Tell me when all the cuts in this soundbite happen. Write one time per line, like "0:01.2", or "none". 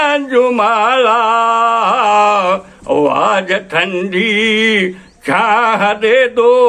none